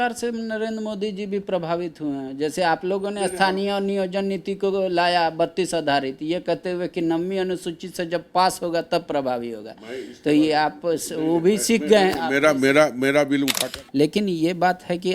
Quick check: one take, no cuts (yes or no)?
no